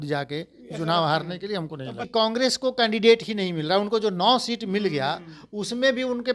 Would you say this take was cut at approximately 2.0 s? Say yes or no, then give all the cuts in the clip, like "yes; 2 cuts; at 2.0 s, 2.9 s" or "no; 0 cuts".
yes; 1 cut; at 2.0 s